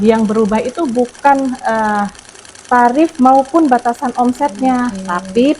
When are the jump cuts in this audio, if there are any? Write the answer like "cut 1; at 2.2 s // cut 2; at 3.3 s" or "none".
none